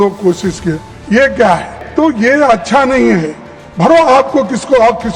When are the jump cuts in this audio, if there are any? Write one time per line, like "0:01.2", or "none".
0:01.8